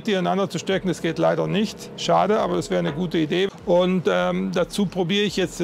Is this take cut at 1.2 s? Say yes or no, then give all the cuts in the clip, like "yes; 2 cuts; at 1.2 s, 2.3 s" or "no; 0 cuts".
no; 1 cut; at 3.5 s